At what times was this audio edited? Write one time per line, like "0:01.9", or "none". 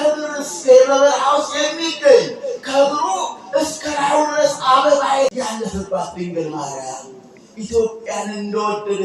0:05.3